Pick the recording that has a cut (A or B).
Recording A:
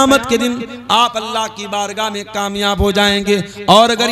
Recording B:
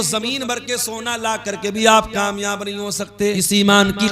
B